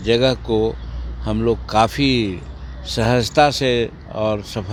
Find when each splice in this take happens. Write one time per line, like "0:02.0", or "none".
none